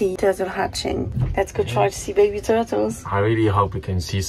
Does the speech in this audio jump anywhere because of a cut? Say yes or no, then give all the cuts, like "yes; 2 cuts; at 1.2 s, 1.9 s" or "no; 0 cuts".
yes; 1 cut; at 1.1 s